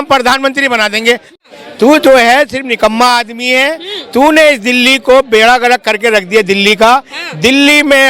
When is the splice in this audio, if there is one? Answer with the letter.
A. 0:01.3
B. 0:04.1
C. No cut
A